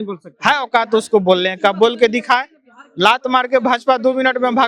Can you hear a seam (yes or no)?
no